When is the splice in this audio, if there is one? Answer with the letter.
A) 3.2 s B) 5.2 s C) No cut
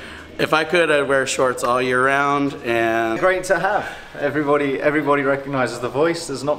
A